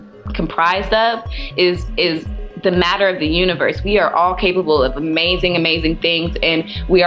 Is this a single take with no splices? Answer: yes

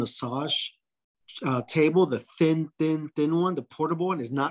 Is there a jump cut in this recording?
no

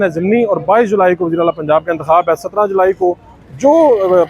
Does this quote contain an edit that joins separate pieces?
no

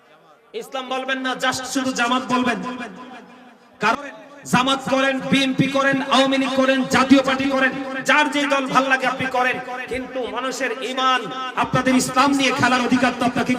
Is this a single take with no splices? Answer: no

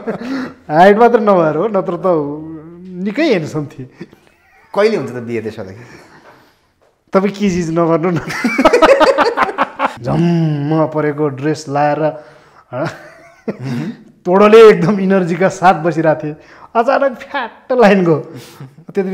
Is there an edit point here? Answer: yes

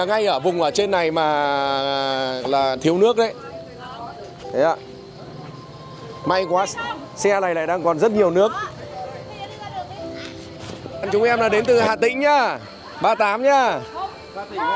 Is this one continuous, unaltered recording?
no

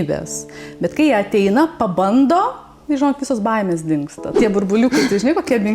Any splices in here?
yes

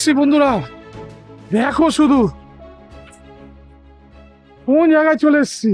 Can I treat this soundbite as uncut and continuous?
no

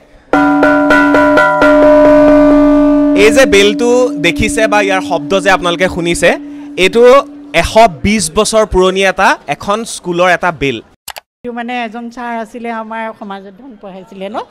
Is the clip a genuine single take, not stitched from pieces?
no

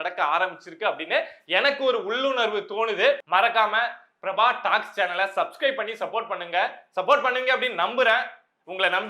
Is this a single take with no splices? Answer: no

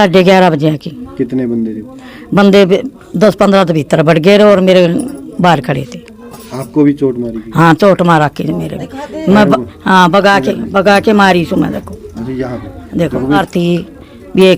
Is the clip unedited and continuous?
no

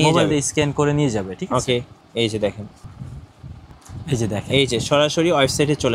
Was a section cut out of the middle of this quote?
no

